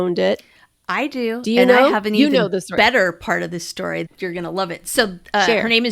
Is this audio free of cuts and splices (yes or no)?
no